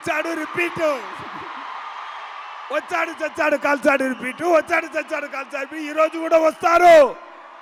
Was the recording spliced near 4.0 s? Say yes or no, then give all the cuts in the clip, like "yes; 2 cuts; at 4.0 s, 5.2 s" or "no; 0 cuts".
no; 0 cuts